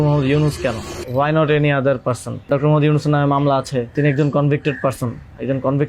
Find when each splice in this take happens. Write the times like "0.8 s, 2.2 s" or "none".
0.9 s, 2.5 s, 3.9 s